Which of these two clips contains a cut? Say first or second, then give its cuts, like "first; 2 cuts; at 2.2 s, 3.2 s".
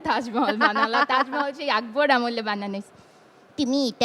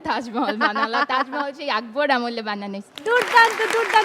second; 1 cut; at 2.9 s